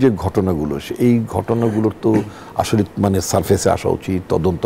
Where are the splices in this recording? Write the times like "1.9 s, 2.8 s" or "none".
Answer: none